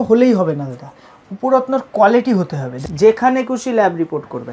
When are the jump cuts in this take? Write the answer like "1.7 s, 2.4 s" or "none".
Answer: 2.8 s